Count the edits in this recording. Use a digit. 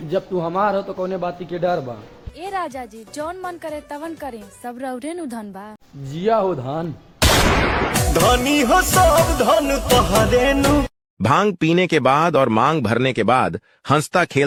0